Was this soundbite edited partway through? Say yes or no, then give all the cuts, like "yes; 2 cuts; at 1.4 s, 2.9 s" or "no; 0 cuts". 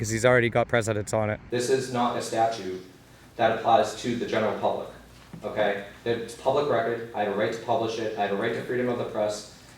yes; 1 cut; at 1.4 s